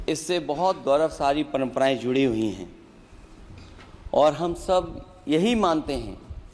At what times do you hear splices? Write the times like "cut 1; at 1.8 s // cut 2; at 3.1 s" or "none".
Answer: none

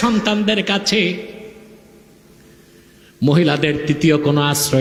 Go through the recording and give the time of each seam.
none

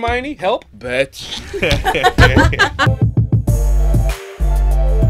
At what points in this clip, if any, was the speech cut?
cut 1; at 2.9 s

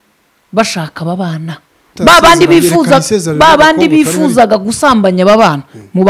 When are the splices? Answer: cut 1; at 1.9 s

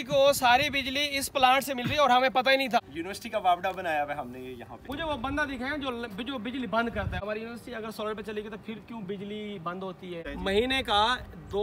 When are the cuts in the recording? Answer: cut 1; at 2.8 s // cut 2; at 4.8 s // cut 3; at 7.2 s // cut 4; at 10.3 s

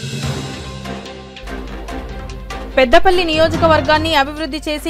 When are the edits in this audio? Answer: cut 1; at 2.6 s

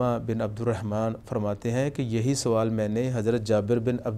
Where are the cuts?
none

